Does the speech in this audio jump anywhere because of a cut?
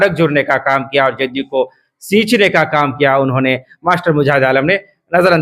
no; 0 cuts

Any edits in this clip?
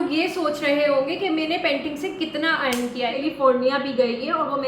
yes; 1 cut; at 3.2 s

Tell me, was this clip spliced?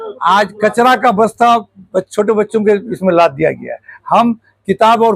no; 0 cuts

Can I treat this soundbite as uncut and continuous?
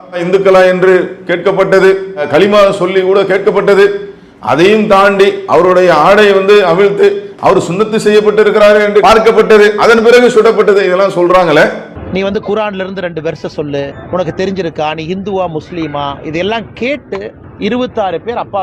yes; 0 cuts

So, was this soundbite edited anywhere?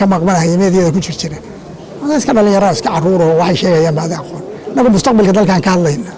no; 0 cuts

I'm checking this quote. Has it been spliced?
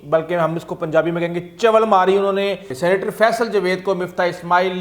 yes; 1 cut; at 2.7 s

